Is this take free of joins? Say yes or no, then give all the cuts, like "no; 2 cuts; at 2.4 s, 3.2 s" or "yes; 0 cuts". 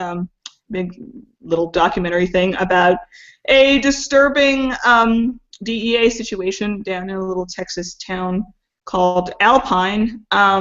yes; 0 cuts